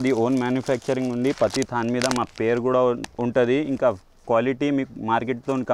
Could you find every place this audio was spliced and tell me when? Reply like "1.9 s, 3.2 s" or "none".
none